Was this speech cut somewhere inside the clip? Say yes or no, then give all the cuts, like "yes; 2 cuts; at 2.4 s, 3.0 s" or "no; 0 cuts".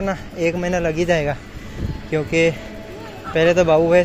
no; 0 cuts